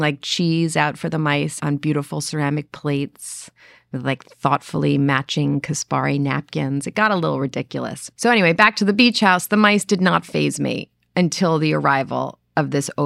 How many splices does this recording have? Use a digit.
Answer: 2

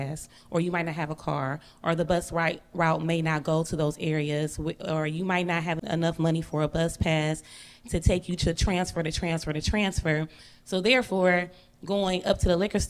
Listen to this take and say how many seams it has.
1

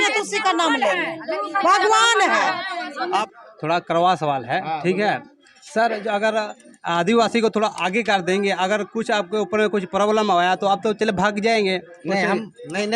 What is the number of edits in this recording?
1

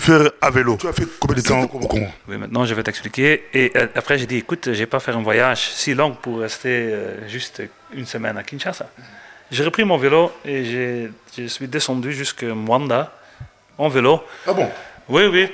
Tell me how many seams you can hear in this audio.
1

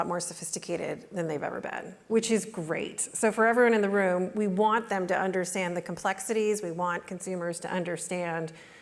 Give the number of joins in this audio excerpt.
0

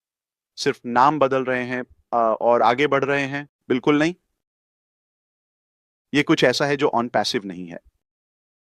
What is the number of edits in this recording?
0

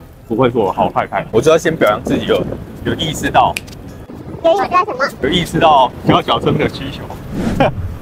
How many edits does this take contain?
2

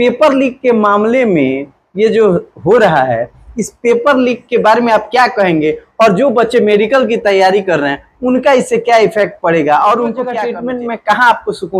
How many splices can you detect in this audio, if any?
1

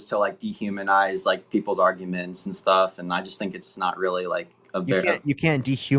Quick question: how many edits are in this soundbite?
0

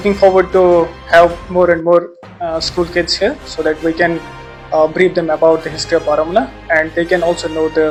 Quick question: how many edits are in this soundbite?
0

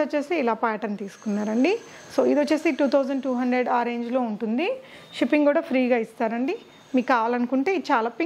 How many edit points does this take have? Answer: 0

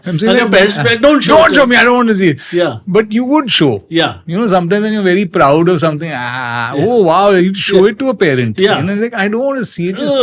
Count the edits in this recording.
0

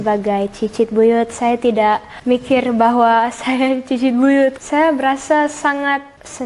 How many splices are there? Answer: 1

